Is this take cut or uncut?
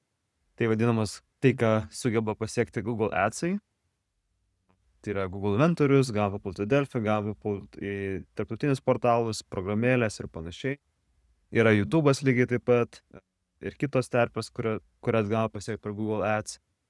uncut